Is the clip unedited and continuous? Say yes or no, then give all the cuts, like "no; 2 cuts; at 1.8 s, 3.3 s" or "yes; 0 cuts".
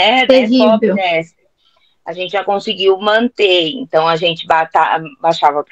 yes; 0 cuts